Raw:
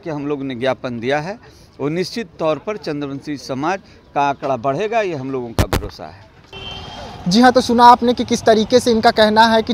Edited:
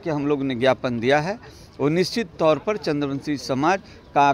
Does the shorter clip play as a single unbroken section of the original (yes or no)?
yes